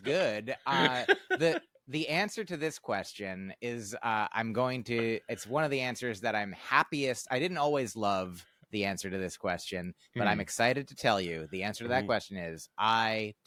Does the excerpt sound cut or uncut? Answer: uncut